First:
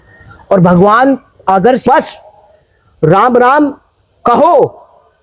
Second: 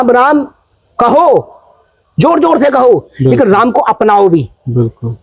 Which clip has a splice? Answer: first; 1 cut; at 1.8 s

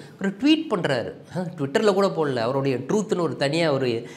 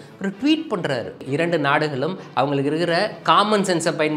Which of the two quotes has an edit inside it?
second; 1 cut; at 1.2 s

